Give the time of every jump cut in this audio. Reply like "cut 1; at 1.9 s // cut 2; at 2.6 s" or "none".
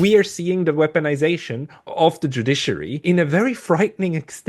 cut 1; at 1.8 s // cut 2; at 3.0 s